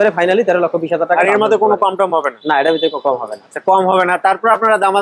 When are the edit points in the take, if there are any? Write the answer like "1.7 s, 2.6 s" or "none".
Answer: none